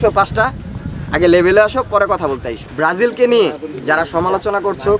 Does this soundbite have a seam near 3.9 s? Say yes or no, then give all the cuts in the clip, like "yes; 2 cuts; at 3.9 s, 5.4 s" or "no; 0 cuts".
no; 1 cut; at 2.6 s